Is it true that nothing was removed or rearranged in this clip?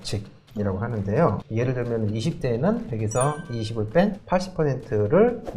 no; 1 cut; at 1.4 s

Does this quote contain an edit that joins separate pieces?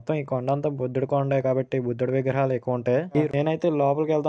yes; 1 cut; at 3.3 s

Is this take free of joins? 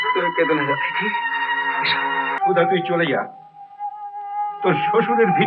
no; 1 cut; at 2.4 s

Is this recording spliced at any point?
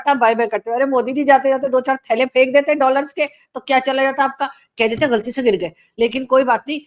no; 0 cuts

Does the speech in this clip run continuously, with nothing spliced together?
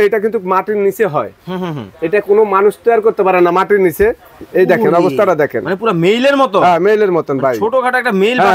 yes; 0 cuts

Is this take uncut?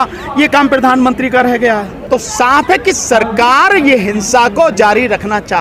no; 1 cut; at 1.9 s

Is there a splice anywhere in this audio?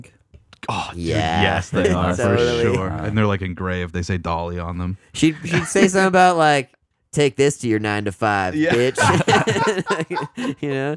no; 0 cuts

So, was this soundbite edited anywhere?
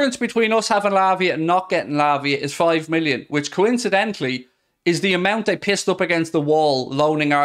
no; 0 cuts

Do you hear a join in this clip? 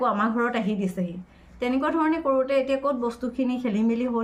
no; 0 cuts

